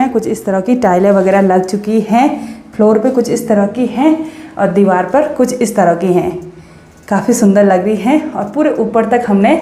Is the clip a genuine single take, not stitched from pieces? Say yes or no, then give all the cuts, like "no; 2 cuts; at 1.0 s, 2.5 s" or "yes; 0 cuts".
yes; 0 cuts